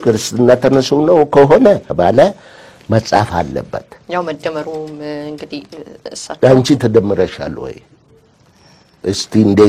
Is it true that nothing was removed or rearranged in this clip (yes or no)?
no